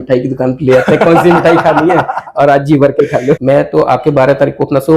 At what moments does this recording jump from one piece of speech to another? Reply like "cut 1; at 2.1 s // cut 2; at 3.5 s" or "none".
cut 1; at 3.4 s